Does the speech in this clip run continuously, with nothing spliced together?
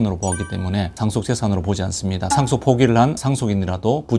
no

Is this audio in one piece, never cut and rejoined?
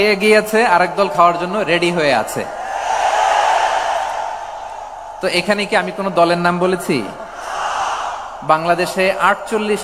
yes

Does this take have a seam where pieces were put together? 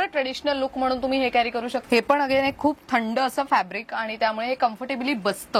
yes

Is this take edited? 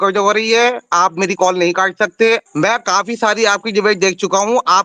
yes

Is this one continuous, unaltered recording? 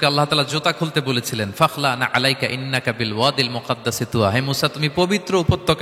yes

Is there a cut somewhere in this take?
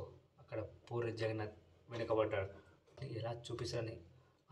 yes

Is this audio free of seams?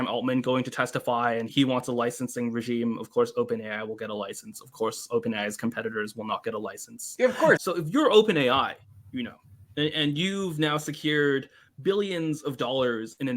no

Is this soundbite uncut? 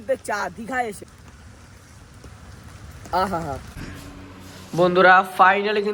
yes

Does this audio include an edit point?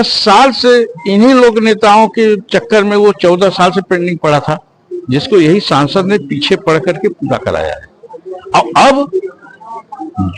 no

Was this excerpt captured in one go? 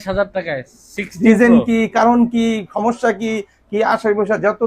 yes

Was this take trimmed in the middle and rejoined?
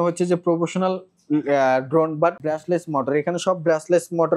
yes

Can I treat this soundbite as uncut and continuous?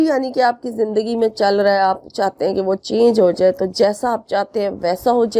yes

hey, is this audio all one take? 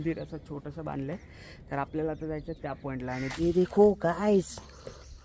no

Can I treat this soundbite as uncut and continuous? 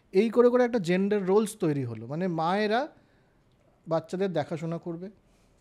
yes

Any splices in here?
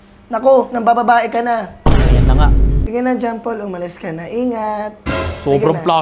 yes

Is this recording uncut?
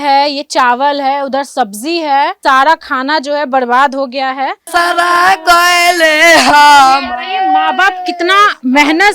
no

